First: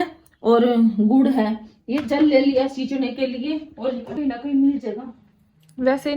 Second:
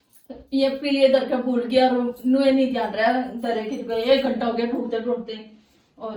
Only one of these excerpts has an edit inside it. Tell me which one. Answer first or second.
first